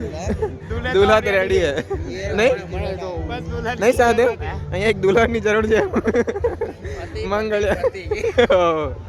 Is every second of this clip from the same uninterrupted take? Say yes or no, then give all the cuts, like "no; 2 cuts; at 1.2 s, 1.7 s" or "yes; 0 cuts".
yes; 0 cuts